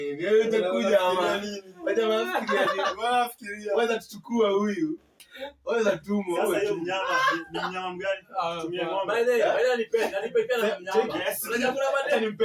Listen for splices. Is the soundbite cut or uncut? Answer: uncut